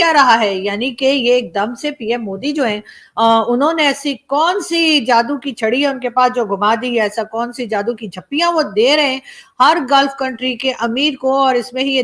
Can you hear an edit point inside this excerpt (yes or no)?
no